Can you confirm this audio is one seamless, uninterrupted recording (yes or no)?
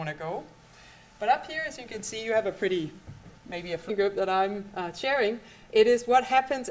yes